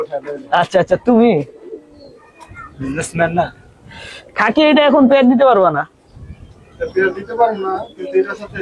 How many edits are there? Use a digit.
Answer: 0